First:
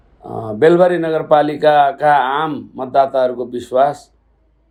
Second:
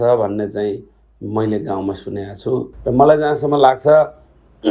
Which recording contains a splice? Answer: second; 1 cut; at 2.7 s

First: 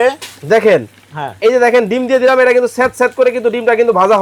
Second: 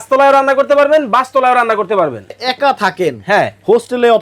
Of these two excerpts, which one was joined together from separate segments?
second; 1 cut; at 2.4 s

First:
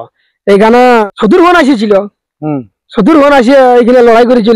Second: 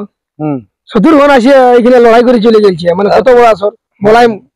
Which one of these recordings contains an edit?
first; 1 cut; at 1.1 s

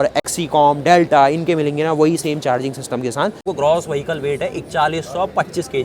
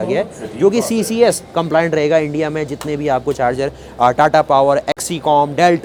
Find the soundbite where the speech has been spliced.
first; 1 cut; at 3.5 s

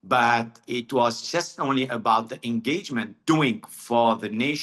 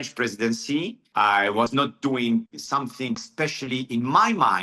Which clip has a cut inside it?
second; 1 cut; at 1.0 s

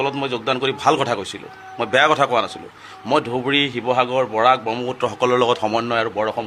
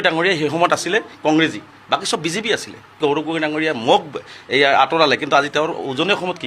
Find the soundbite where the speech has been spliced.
second; 1 cut; at 2.9 s

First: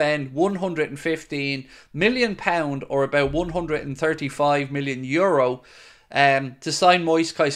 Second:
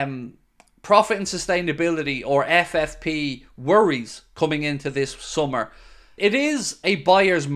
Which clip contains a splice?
second; 1 cut; at 6.2 s

